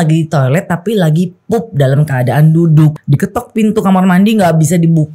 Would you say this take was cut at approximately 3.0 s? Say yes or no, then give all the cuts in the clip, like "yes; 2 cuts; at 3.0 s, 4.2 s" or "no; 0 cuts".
yes; 1 cut; at 3.0 s